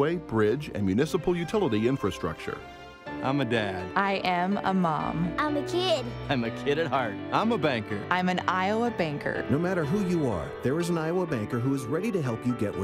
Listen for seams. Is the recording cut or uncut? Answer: uncut